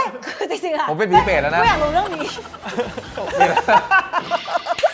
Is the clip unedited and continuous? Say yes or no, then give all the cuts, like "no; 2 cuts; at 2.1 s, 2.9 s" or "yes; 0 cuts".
yes; 0 cuts